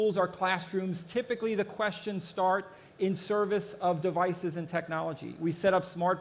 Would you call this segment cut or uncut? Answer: uncut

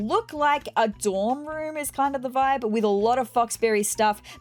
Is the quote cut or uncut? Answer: uncut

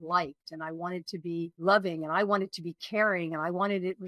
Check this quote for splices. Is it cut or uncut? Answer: cut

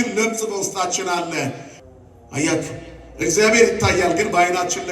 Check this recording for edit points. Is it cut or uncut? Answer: cut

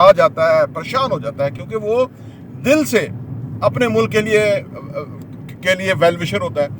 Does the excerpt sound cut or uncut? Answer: uncut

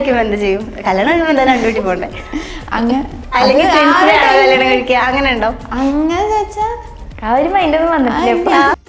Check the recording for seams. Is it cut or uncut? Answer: uncut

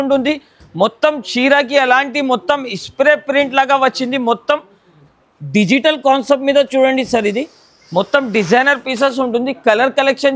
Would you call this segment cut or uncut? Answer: uncut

